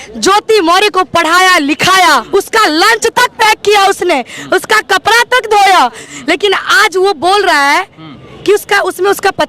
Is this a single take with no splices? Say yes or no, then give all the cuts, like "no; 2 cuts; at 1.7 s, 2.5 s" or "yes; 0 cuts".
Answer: no; 2 cuts; at 2.2 s, 6.1 s